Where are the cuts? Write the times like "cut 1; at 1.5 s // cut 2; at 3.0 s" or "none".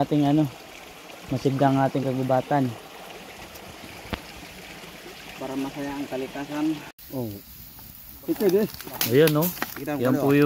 cut 1; at 6.9 s